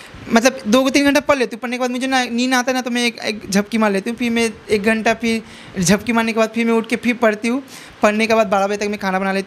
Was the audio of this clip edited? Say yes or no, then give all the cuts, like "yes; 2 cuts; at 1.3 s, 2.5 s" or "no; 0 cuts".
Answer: no; 0 cuts